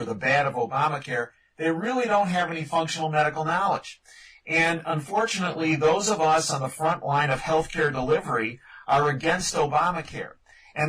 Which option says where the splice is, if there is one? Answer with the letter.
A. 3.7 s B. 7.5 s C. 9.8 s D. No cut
C